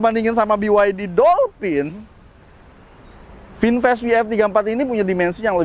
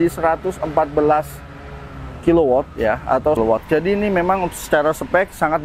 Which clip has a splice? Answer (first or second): second